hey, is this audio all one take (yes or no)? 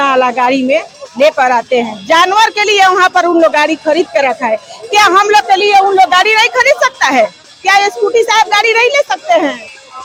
yes